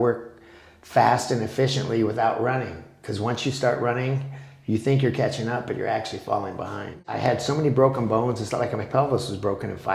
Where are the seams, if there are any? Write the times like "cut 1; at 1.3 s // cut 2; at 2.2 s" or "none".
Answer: cut 1; at 7.2 s